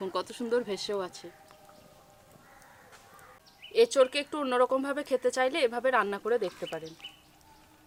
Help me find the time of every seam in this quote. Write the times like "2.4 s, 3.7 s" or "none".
none